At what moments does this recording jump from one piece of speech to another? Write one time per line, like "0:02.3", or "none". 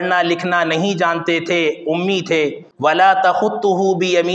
0:02.7